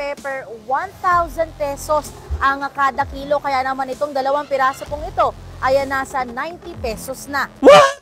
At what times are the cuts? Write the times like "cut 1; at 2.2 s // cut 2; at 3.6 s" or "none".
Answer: none